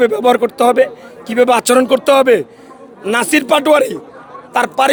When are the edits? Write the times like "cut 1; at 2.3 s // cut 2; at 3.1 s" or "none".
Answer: none